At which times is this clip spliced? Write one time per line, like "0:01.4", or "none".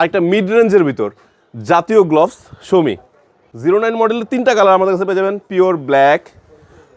0:03.4